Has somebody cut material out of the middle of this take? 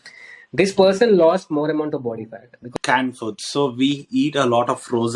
yes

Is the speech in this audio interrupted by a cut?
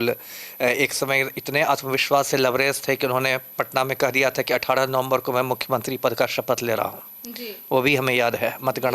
no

